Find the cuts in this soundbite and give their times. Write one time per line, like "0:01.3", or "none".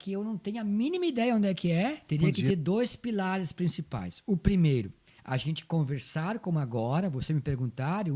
0:02.0